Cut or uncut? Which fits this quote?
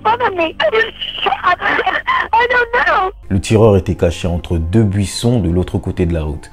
uncut